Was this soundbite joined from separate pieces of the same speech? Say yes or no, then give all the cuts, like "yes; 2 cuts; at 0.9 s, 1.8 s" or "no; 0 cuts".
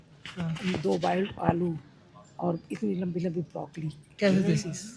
no; 0 cuts